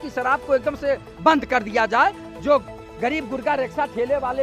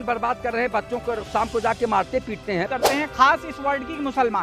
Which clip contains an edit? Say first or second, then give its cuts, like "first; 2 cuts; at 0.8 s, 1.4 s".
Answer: second; 1 cut; at 2.7 s